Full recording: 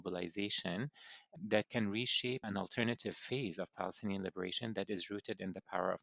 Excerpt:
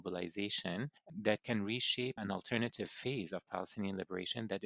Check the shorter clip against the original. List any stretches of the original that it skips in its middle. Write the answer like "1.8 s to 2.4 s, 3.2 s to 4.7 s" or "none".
1.0 s to 1.3 s